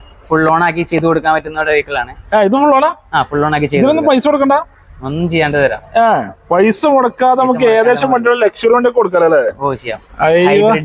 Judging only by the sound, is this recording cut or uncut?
uncut